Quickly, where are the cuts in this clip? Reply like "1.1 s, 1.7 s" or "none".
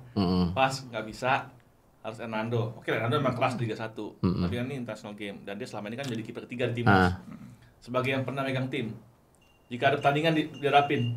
none